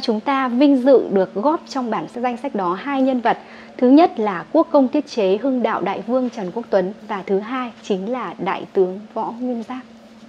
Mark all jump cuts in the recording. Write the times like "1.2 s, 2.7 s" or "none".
2.1 s